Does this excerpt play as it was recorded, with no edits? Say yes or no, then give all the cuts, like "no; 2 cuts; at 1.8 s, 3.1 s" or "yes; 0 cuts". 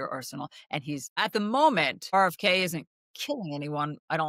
no; 2 cuts; at 1.2 s, 2.0 s